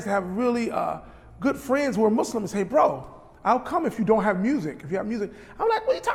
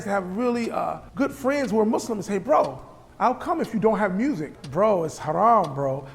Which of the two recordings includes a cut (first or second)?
second